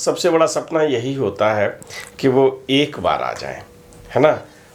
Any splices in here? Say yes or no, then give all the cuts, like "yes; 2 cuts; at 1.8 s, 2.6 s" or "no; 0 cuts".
no; 0 cuts